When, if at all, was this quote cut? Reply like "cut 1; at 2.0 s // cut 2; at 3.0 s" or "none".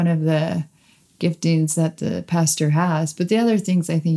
none